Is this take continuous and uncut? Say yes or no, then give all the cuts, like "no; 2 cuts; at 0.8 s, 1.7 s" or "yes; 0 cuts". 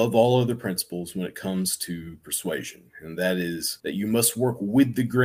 no; 1 cut; at 3.7 s